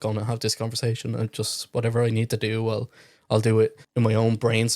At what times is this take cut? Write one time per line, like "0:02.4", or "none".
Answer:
0:03.8